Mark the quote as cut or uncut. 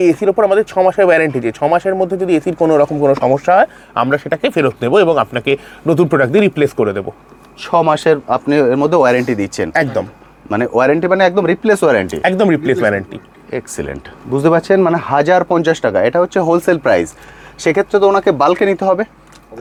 uncut